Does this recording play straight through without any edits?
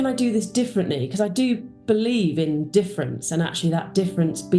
yes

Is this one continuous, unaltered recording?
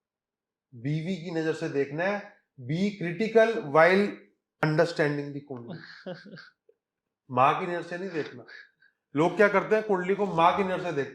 yes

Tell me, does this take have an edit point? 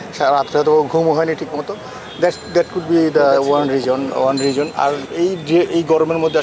no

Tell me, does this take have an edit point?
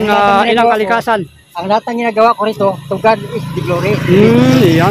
no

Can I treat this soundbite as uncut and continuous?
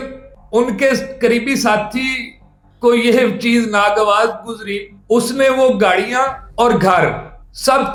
yes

